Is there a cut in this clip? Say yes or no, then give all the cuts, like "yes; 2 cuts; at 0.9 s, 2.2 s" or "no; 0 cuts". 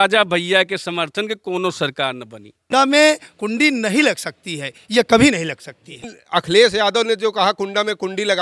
yes; 2 cuts; at 2.7 s, 6.1 s